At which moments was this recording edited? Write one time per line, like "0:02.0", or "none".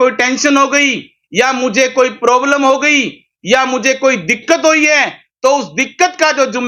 none